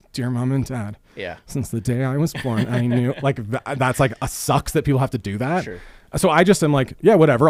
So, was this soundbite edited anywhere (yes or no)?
no